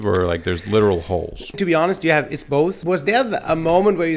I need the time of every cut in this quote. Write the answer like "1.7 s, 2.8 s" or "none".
2.8 s